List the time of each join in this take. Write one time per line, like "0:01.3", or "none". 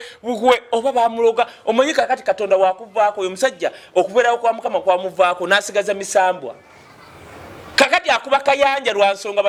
none